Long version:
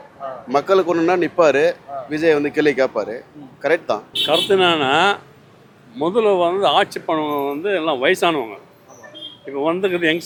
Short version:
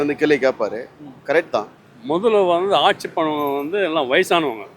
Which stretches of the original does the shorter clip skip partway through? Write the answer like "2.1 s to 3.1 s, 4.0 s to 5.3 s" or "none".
4.1 s to 5.7 s